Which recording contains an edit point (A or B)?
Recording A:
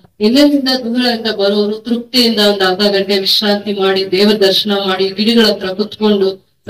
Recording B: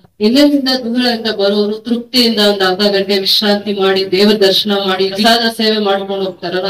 B